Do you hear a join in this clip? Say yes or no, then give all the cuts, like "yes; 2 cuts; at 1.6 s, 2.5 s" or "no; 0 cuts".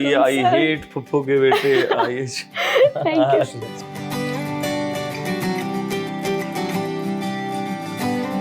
no; 0 cuts